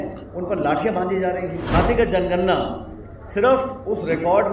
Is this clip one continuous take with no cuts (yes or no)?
no